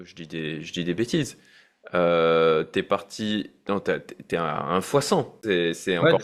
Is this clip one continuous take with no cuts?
yes; 0 cuts

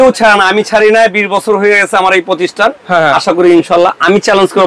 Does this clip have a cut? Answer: no; 0 cuts

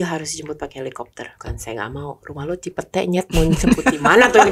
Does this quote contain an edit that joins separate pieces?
yes; 1 cut; at 1.3 s

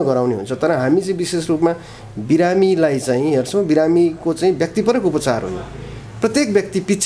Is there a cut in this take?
no; 0 cuts

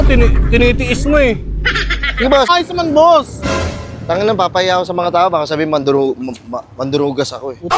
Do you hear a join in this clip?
yes; 1 cut; at 2.5 s

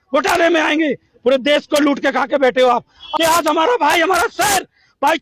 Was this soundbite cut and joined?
yes; 1 cut; at 3.0 s

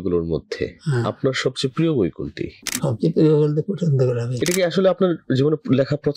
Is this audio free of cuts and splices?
no; 1 cut; at 4.3 s

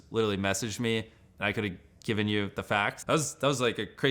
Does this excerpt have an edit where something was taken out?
yes; 1 cut; at 3.0 s

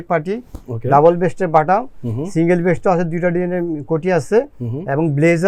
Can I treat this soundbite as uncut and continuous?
yes; 0 cuts

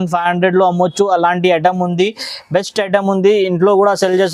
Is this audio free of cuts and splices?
yes; 0 cuts

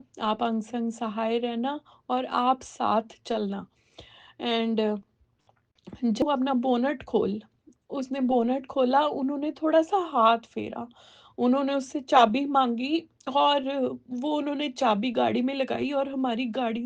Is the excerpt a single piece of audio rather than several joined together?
no; 1 cut; at 6.2 s

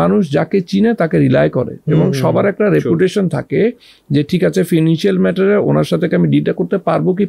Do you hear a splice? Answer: no; 0 cuts

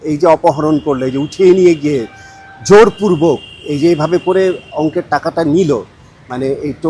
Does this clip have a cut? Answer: no; 0 cuts

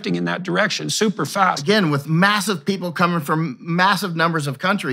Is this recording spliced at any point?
yes; 1 cut; at 1.6 s

